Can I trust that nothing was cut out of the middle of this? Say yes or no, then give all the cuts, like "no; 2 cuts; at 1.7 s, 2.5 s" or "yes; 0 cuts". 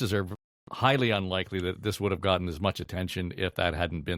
yes; 0 cuts